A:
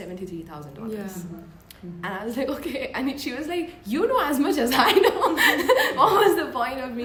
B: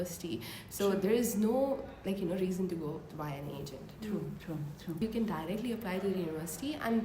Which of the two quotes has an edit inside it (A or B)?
B